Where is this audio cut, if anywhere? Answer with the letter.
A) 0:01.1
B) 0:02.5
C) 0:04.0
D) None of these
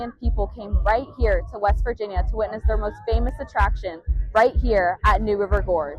D